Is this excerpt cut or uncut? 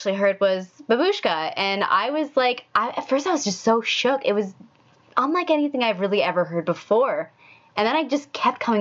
uncut